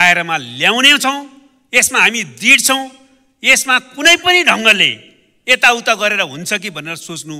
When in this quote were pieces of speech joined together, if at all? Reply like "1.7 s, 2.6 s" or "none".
none